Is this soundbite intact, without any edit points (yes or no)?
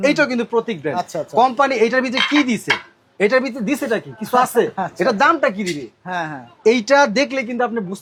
yes